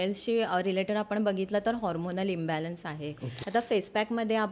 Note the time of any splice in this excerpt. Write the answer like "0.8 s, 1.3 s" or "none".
3.3 s